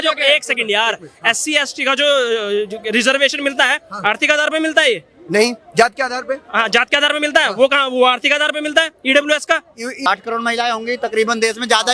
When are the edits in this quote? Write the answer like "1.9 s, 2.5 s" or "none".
10.1 s